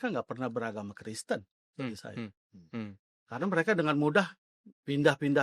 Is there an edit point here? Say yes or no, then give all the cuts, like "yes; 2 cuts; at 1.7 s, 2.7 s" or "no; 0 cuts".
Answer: no; 0 cuts